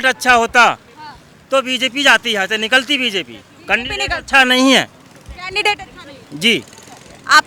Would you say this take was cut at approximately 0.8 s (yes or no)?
no